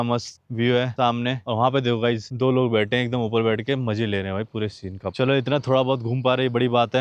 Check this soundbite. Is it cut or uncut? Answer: uncut